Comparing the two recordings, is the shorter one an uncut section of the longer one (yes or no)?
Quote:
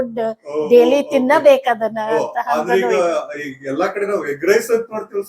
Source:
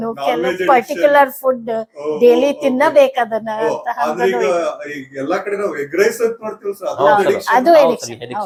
yes